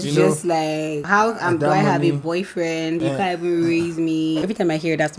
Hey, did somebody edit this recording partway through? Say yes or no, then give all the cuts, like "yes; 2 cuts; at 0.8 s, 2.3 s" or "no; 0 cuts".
yes; 3 cuts; at 1.0 s, 3.0 s, 4.4 s